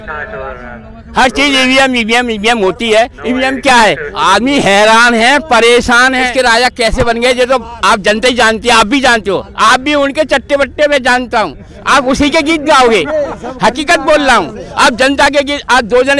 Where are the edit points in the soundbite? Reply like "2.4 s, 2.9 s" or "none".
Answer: 4.1 s, 6.3 s